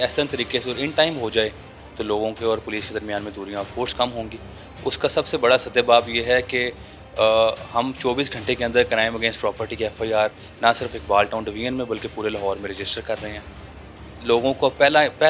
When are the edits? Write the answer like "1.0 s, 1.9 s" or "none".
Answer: none